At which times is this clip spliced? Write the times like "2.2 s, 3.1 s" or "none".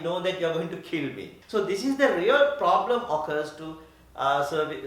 1.3 s